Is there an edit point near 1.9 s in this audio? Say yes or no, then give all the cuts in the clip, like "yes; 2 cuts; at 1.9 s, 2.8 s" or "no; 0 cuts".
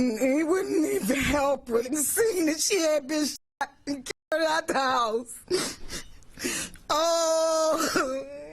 yes; 1 cut; at 1.9 s